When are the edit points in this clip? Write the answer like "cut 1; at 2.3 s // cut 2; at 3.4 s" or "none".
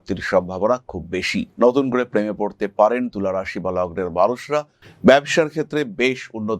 cut 1; at 1.5 s // cut 2; at 4.8 s